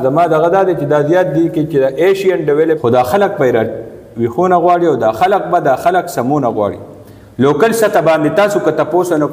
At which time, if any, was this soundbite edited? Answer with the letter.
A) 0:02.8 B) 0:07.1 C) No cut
A